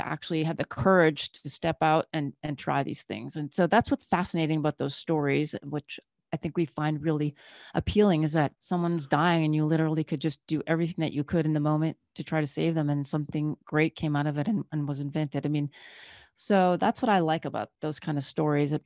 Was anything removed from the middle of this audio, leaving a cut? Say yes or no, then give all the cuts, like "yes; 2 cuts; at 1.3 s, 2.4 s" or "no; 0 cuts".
yes; 2 cuts; at 8.6 s, 17.7 s